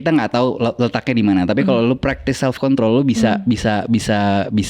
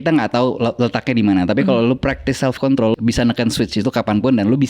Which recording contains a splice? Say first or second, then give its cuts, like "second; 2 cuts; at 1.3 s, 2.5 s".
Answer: second; 1 cut; at 2.9 s